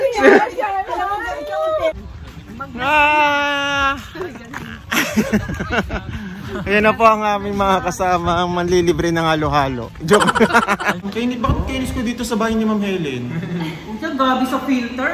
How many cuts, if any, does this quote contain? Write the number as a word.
two